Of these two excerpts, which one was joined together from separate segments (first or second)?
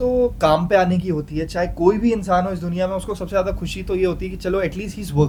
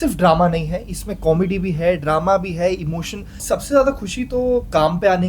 second